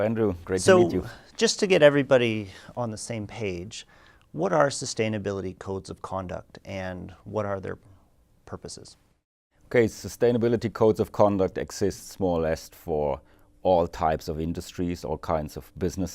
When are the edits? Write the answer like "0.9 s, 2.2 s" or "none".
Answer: 7.2 s